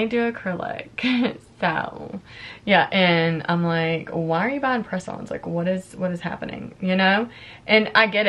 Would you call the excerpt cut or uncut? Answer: uncut